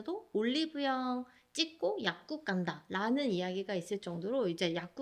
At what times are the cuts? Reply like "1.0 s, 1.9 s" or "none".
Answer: none